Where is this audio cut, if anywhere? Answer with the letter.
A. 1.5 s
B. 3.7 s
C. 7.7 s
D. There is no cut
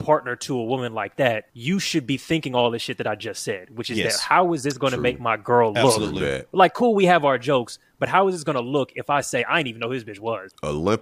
A